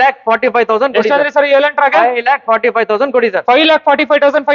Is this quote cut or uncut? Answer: uncut